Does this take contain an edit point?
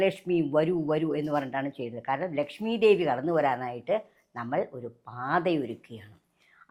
no; 0 cuts

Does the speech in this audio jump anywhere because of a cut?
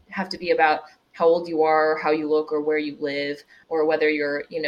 yes; 1 cut; at 3.5 s

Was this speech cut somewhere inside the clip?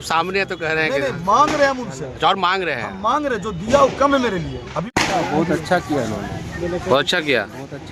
yes; 1 cut; at 4.9 s

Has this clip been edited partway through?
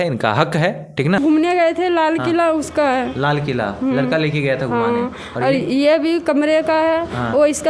yes; 1 cut; at 1.2 s

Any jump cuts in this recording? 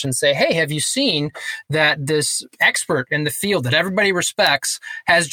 no; 0 cuts

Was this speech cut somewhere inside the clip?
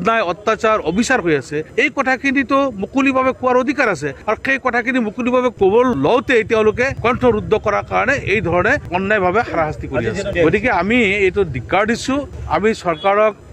no; 0 cuts

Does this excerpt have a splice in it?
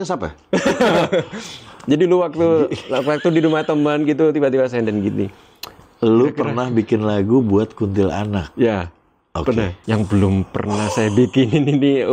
yes; 1 cut; at 9.8 s

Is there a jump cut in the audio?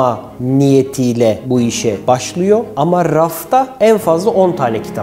no; 0 cuts

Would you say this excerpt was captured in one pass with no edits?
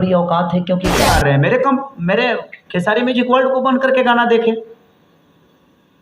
no; 1 cut; at 1.0 s

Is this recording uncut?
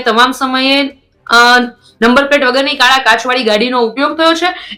yes; 0 cuts

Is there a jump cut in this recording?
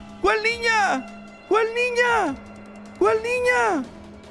no; 0 cuts

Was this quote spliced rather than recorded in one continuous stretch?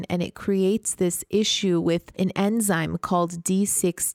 yes; 1 cut; at 2.1 s

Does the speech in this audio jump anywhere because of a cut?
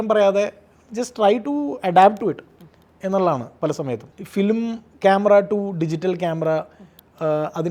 no; 0 cuts

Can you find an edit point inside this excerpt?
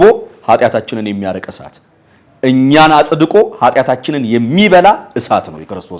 no; 0 cuts

